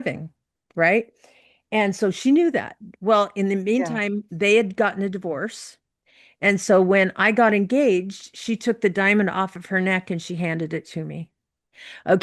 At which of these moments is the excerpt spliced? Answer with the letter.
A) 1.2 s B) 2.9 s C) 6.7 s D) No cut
D